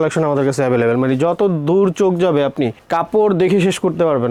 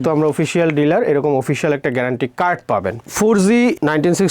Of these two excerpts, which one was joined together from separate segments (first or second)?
second